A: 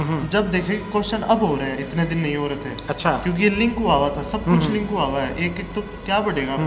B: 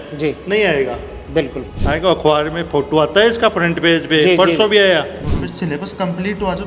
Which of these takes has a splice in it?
B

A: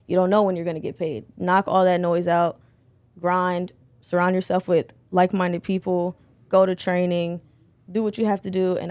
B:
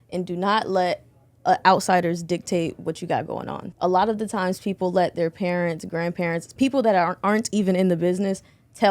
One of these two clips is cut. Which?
B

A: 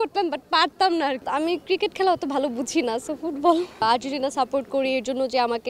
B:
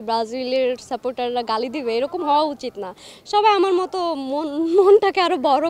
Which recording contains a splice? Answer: A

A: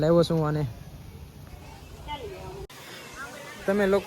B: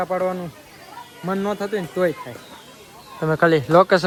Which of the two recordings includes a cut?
A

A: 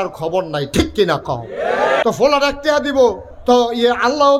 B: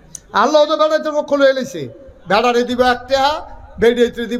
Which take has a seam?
A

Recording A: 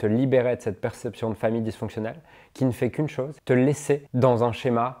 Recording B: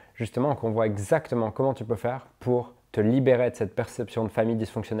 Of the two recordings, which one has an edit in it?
A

